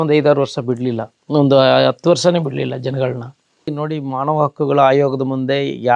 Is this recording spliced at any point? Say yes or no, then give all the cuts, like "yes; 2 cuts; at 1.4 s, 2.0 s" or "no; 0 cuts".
yes; 1 cut; at 3.8 s